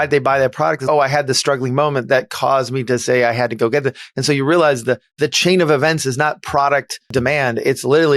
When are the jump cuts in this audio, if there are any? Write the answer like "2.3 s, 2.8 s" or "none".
7.1 s